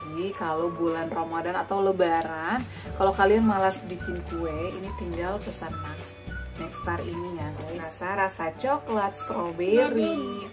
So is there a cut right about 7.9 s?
yes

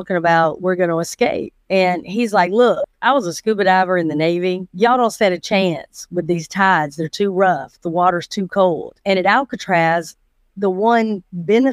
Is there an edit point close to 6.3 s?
no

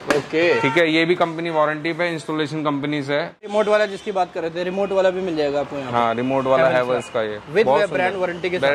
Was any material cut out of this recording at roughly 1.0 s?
no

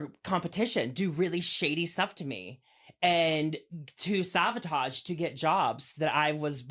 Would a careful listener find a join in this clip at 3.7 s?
no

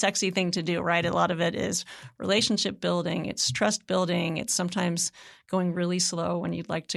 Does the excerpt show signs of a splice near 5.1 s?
no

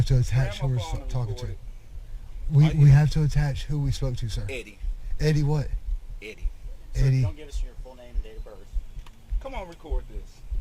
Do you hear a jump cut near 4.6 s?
yes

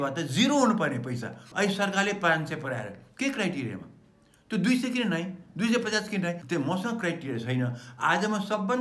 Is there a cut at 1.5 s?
yes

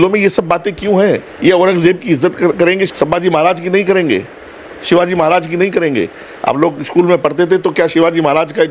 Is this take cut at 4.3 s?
no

